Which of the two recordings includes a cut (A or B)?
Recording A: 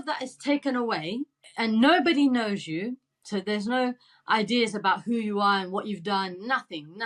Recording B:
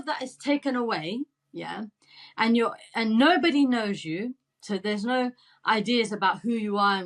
A